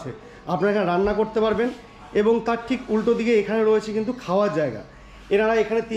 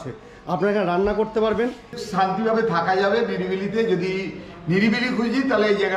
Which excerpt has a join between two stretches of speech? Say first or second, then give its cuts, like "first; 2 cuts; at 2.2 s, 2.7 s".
second; 1 cut; at 2.0 s